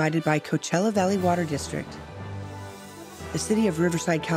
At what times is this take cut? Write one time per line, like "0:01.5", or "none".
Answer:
0:01.8
0:03.3